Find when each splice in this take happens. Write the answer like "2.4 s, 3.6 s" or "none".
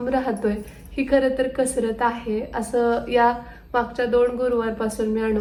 none